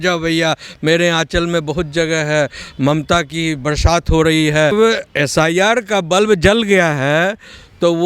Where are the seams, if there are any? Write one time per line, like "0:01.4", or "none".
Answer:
0:04.7

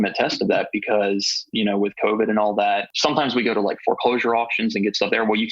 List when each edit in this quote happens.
0:02.9

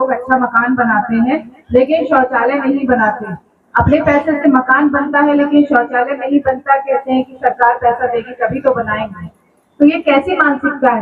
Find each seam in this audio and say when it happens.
none

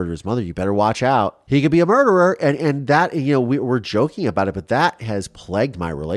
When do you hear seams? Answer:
0:01.4

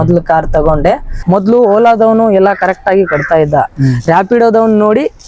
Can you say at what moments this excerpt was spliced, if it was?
0:01.1

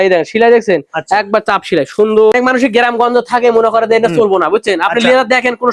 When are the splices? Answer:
0:02.3

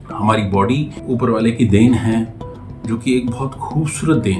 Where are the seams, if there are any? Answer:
0:01.0

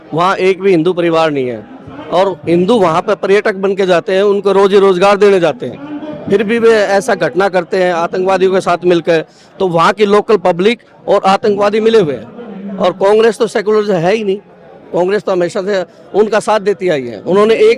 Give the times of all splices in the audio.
none

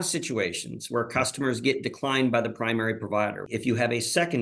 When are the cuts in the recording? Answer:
0:03.5

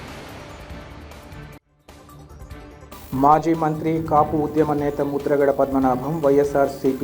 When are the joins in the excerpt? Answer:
0:02.8

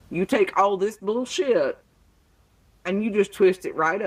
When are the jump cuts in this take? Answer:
none

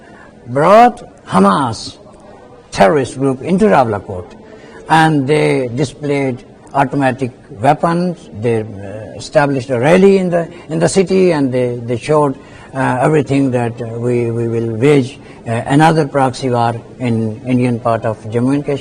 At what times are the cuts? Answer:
none

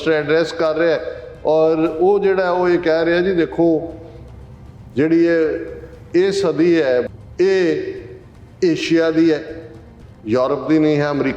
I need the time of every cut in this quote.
0:07.1

